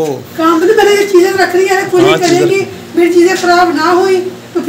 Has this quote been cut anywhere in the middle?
no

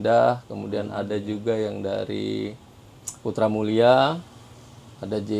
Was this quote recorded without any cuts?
yes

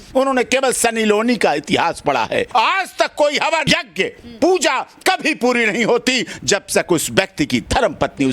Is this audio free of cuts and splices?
no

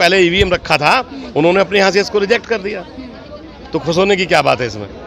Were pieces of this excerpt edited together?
no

